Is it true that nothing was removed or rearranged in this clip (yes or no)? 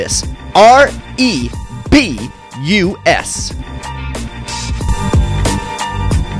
no